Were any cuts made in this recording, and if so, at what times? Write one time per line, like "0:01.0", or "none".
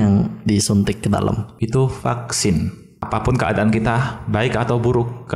0:01.5
0:02.9